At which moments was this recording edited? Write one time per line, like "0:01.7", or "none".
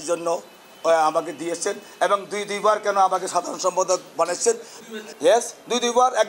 0:04.7